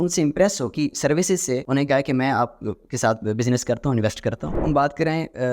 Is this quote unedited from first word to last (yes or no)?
no